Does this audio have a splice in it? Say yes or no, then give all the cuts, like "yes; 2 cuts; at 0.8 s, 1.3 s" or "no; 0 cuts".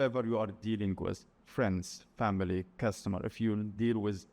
no; 0 cuts